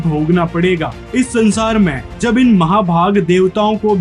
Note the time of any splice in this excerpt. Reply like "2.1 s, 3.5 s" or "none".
none